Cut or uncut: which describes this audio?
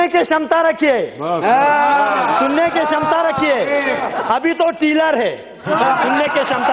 uncut